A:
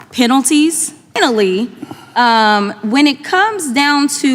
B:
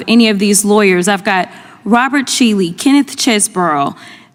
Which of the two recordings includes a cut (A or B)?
A